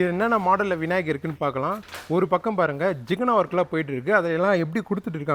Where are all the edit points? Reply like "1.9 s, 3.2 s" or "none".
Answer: none

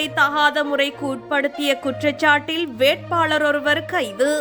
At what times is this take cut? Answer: none

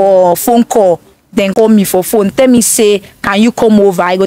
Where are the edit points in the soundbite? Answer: 1.5 s

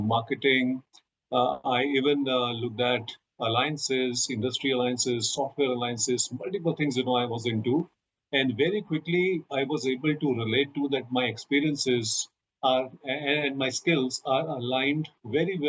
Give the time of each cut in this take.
none

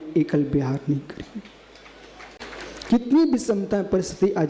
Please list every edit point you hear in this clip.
2.4 s

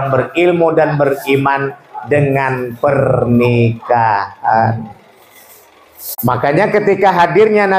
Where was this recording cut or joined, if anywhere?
6.2 s

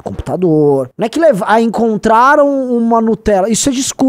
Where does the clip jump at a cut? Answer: 0.9 s

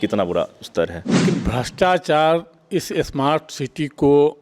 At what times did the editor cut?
1.2 s

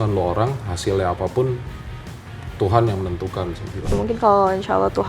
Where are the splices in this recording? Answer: 3.9 s

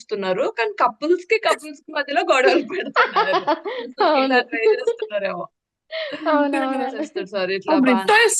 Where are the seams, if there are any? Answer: 7.0 s

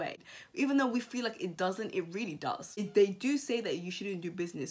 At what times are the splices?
2.7 s

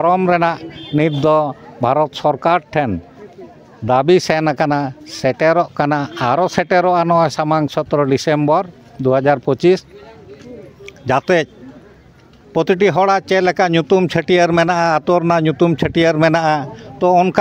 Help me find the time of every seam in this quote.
none

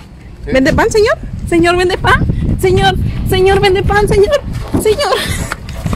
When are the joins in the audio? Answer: none

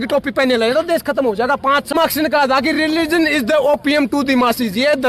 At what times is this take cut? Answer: 1.9 s

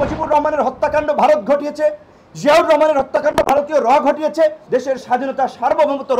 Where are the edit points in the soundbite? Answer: 4.6 s

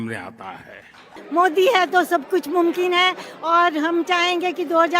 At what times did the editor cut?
1.3 s

